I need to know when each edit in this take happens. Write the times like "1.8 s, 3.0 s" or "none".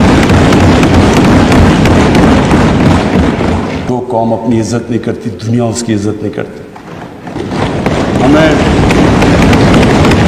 3.8 s